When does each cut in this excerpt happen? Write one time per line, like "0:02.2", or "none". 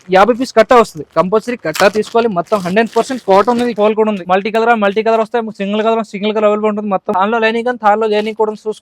0:03.9
0:07.1